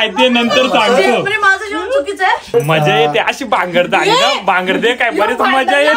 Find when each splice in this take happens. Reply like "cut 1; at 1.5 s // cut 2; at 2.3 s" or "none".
cut 1; at 2.5 s